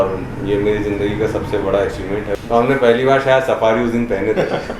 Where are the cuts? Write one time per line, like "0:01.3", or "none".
0:02.3